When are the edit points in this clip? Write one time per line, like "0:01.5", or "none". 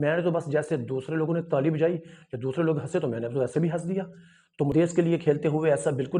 0:04.7

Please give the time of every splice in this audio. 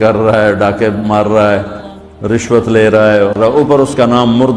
0:03.5

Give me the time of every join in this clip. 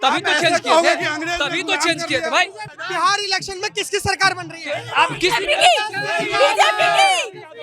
0:02.7

